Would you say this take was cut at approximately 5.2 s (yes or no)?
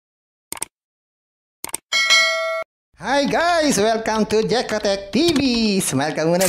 no